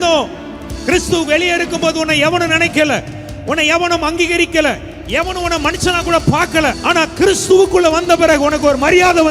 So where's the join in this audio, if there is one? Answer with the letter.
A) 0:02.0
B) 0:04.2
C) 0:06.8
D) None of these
C